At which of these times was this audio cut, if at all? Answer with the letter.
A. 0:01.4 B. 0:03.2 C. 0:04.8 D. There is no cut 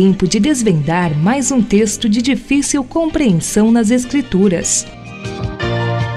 C